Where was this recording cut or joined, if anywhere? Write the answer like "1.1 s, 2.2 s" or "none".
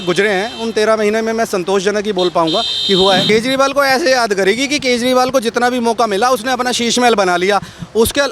3.2 s